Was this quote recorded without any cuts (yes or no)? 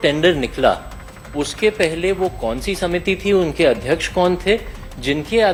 yes